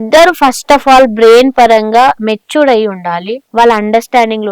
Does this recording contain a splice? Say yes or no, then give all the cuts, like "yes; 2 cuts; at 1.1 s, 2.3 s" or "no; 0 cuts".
yes; 1 cut; at 3.3 s